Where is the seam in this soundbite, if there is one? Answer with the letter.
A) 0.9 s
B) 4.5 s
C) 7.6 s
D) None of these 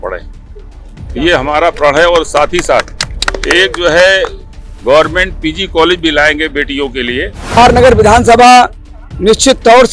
C